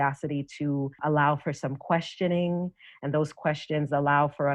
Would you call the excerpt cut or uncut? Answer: cut